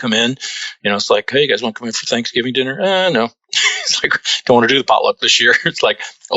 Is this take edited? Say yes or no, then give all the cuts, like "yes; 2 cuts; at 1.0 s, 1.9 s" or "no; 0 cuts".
yes; 1 cut; at 1.3 s